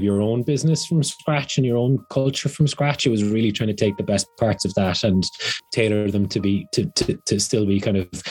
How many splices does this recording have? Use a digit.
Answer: 1